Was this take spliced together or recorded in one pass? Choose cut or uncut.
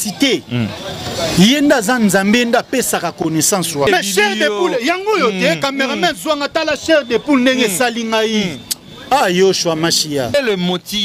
cut